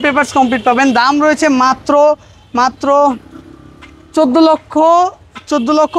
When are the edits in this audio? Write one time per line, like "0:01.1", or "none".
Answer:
none